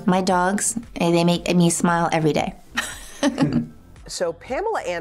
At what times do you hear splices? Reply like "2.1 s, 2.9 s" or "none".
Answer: 3.9 s